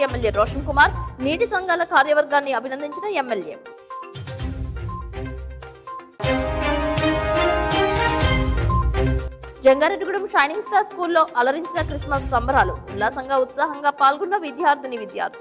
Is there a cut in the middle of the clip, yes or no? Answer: no